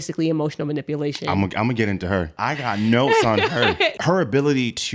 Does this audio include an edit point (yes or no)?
yes